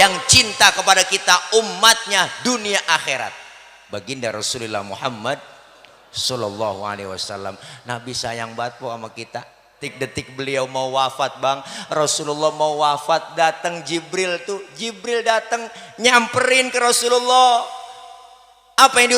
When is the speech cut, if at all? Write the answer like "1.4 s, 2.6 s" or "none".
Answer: 9.9 s